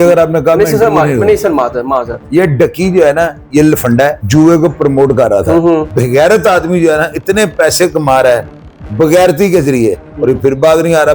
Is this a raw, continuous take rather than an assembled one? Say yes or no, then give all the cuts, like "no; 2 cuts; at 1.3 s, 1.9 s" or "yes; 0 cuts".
no; 2 cuts; at 4.2 s, 5.9 s